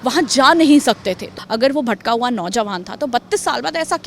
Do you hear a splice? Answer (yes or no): yes